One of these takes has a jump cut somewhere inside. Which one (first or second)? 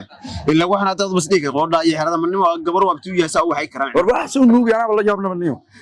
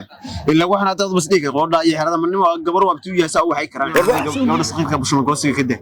second